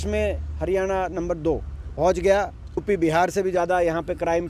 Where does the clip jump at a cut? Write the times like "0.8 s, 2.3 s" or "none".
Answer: 1.8 s, 2.8 s

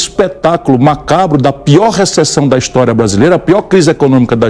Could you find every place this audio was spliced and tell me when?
none

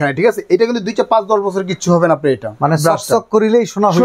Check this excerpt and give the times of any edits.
none

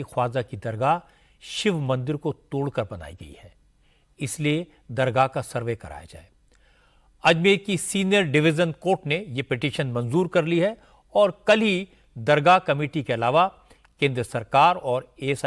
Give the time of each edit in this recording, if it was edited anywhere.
none

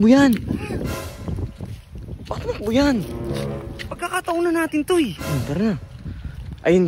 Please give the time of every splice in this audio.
none

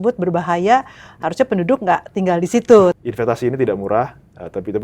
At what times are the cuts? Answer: 2.9 s

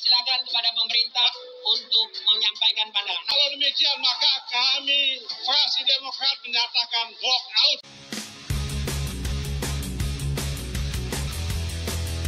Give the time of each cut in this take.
3.3 s, 7.9 s

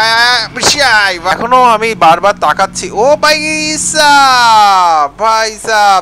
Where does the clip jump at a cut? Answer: 1.3 s

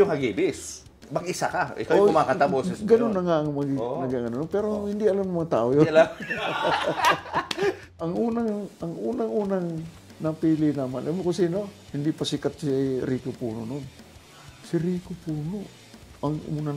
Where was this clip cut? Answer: 7.8 s

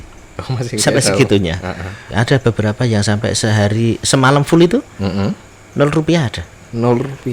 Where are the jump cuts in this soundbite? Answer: 2.0 s

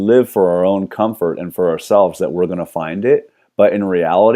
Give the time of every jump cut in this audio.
3.4 s

